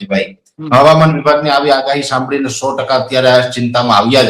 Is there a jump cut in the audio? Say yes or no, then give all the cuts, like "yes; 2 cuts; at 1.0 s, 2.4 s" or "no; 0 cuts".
no; 0 cuts